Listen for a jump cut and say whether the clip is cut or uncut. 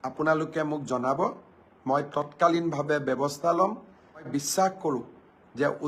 cut